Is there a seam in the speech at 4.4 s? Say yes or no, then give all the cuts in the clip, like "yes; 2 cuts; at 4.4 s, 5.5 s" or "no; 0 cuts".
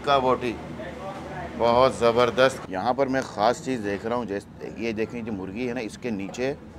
no; 1 cut; at 2.6 s